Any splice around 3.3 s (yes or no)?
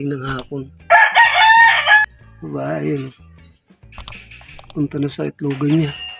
no